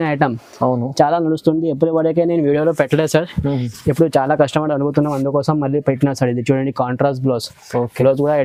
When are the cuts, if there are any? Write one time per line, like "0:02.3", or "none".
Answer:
none